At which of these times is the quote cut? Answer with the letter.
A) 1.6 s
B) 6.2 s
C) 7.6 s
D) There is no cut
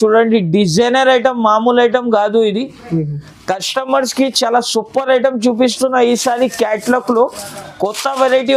D